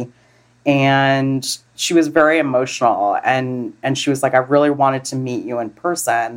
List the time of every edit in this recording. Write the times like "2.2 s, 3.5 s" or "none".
1.6 s